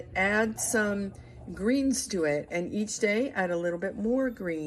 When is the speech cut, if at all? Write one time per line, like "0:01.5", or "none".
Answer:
none